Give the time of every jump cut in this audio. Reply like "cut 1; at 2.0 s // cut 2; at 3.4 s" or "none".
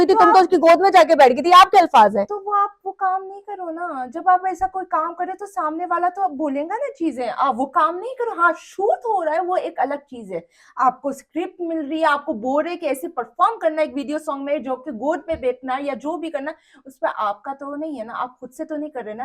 none